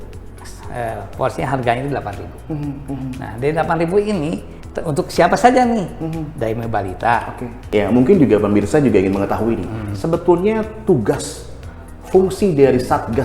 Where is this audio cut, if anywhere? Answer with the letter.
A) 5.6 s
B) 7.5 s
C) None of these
B